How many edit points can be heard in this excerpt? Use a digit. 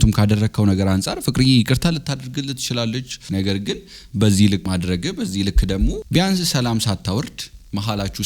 2